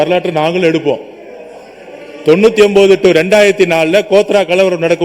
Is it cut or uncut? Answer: uncut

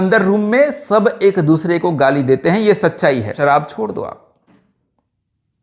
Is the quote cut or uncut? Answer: cut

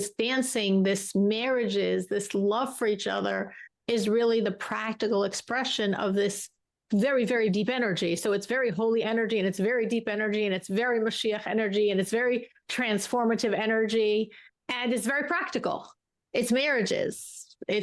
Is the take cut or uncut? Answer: uncut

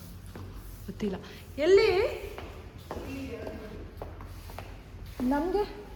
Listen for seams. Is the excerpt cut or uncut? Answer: uncut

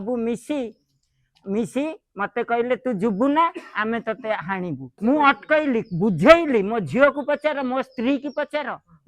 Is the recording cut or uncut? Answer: cut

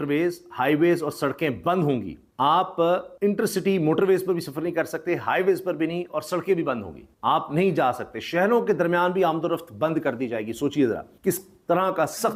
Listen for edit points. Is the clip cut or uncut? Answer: uncut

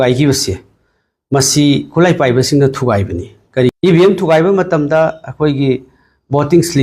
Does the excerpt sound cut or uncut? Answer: cut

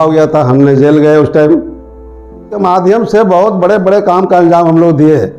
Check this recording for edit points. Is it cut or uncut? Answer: cut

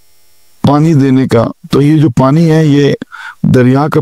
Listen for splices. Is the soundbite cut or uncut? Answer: uncut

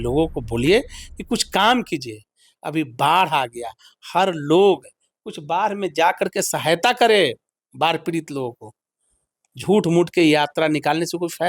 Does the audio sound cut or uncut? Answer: uncut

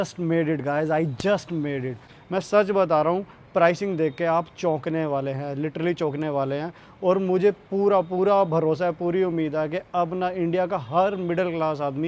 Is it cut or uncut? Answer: cut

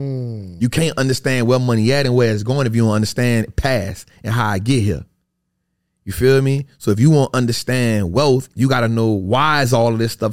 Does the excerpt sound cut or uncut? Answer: uncut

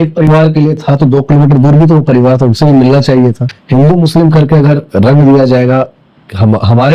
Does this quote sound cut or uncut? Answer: cut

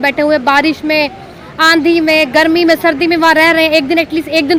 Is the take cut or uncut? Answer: uncut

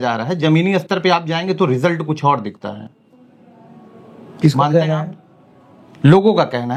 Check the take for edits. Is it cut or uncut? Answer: uncut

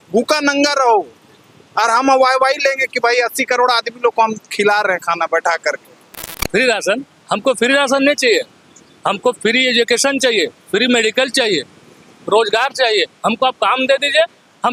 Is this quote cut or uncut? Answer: uncut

